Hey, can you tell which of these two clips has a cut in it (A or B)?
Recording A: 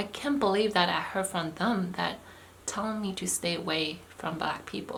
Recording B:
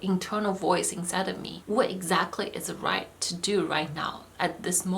B